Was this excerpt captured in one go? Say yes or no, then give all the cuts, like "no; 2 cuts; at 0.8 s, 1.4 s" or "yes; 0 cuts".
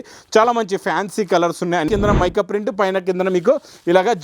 no; 1 cut; at 1.9 s